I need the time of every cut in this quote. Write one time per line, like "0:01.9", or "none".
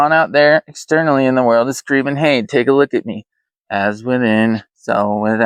none